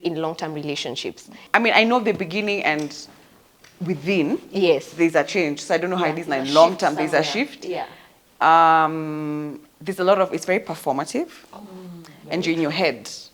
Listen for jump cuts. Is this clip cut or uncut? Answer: cut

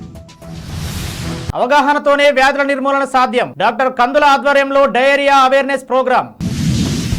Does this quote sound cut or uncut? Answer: cut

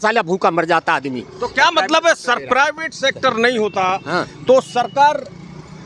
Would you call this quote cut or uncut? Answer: uncut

